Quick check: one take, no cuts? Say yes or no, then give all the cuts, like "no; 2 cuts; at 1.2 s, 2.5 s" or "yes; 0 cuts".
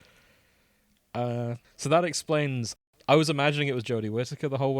no; 2 cuts; at 1.7 s, 2.8 s